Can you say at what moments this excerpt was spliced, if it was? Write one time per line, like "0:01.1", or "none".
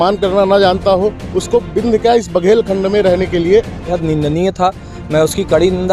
0:04.0